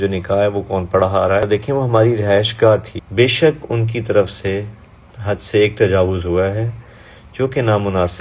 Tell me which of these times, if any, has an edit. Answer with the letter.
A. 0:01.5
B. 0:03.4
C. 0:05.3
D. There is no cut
A